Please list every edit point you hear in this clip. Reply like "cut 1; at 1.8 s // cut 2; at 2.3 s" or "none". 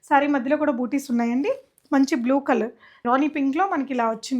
cut 1; at 3.0 s